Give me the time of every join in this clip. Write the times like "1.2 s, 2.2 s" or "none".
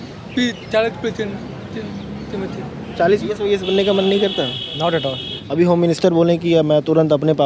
3.3 s, 5.3 s